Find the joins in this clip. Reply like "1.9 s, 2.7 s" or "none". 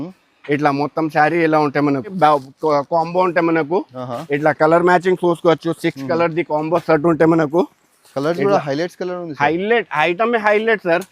2.1 s